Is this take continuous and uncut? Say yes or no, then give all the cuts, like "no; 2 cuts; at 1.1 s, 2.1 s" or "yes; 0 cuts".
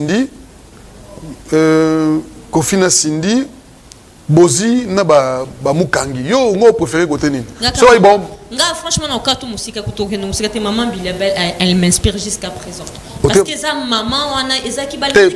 yes; 0 cuts